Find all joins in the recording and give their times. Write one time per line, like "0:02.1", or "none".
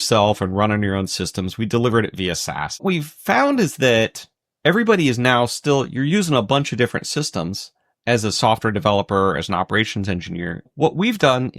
0:02.8
0:10.7